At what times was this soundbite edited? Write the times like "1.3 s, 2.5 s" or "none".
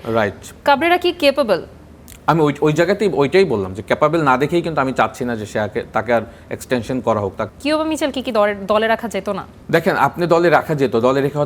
7.4 s, 9.5 s